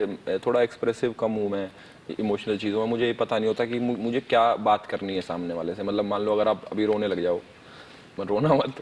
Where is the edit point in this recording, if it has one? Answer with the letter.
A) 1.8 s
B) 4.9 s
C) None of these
C